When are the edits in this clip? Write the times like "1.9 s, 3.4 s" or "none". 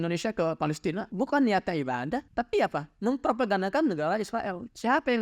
1.1 s, 2.3 s